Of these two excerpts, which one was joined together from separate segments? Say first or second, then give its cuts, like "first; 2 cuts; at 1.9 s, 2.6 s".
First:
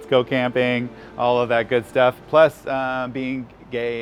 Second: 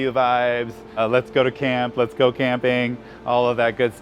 second; 1 cut; at 1.0 s